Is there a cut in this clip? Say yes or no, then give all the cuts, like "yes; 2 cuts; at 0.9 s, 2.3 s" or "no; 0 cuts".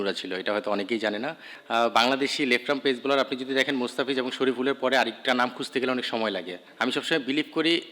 yes; 2 cuts; at 1.5 s, 6.7 s